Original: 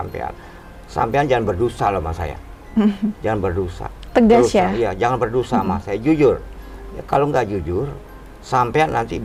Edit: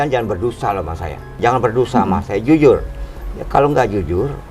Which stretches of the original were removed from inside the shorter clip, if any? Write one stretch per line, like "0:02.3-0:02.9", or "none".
0:02.5-0:04.9